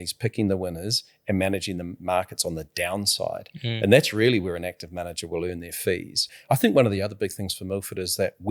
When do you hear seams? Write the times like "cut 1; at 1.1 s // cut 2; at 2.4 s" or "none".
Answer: cut 1; at 6.3 s